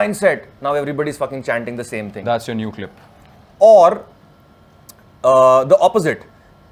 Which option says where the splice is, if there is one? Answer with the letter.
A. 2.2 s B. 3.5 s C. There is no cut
C